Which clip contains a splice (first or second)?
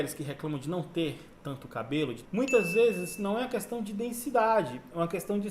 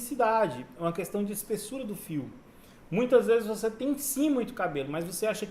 first